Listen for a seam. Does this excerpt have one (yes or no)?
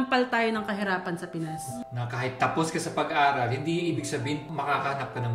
yes